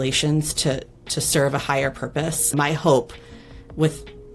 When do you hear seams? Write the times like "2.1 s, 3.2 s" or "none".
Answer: 2.5 s